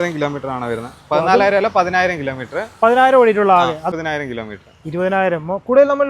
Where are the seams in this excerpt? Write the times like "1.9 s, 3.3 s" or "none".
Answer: 3.9 s